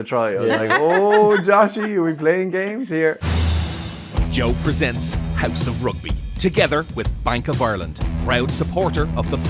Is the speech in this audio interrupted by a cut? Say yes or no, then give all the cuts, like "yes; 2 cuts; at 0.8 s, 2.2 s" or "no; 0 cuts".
yes; 1 cut; at 3.3 s